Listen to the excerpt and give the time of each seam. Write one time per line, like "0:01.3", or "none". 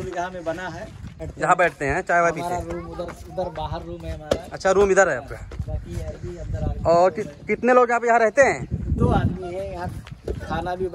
0:01.3